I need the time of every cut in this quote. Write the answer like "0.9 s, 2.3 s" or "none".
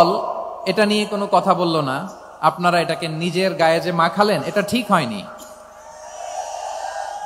none